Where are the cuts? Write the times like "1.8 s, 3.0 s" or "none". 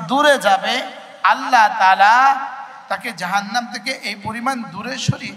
2.6 s